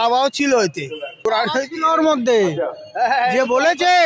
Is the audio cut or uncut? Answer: cut